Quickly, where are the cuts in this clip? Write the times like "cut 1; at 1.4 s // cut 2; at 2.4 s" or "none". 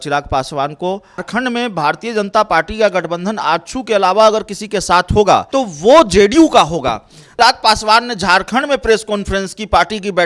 cut 1; at 1.2 s // cut 2; at 5.5 s // cut 3; at 7.3 s